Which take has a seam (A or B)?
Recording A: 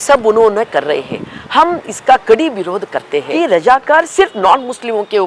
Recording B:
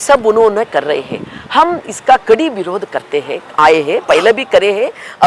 A